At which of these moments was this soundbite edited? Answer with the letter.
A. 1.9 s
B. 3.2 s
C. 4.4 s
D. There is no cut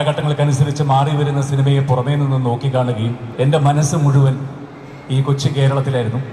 B